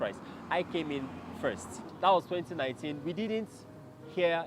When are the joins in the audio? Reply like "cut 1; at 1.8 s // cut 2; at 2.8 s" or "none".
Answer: cut 1; at 1.9 s